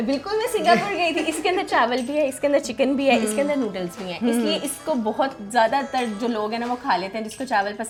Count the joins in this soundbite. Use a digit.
0